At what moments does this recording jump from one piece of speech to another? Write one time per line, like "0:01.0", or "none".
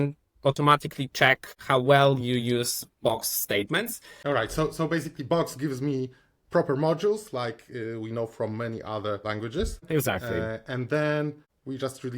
0:04.1